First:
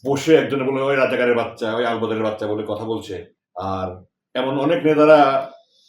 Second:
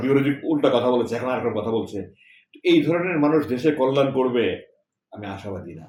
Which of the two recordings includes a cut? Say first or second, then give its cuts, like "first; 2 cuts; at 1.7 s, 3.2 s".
first; 1 cut; at 3.4 s